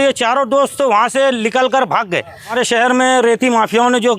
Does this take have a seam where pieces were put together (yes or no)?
yes